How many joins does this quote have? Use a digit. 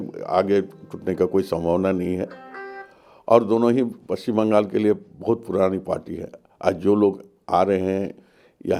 0